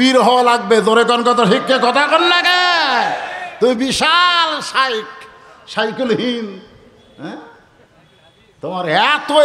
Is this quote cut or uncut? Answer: uncut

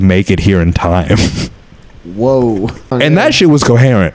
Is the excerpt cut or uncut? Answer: cut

